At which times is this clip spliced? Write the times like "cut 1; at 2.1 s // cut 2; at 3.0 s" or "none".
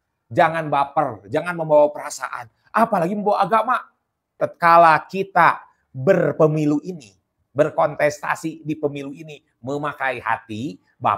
cut 1; at 4.4 s